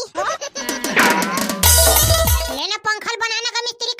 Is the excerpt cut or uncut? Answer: cut